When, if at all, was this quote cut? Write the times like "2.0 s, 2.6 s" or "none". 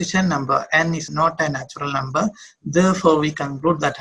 1.1 s